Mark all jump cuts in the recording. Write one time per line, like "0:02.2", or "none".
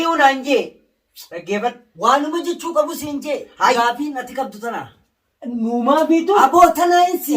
0:03.8